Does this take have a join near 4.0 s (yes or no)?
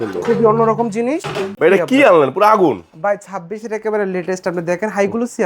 no